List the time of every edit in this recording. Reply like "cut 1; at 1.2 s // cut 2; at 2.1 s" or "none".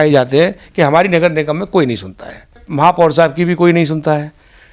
cut 1; at 2.6 s